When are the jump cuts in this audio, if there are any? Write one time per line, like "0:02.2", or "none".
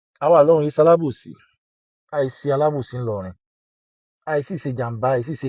none